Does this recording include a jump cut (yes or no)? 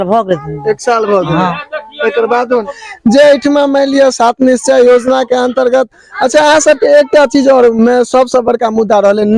yes